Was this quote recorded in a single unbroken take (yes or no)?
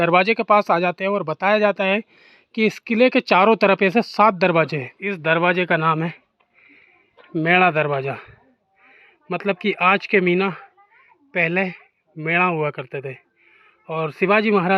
no